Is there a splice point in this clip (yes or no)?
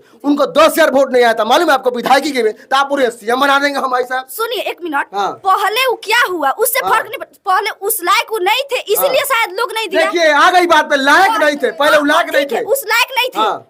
no